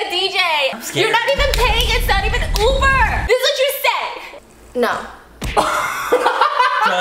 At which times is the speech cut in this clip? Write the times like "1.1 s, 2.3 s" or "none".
0.7 s, 3.2 s